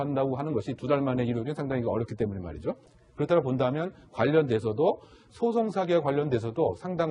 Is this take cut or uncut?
cut